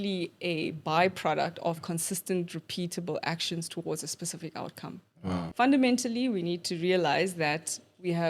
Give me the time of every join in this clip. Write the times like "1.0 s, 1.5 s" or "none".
5.5 s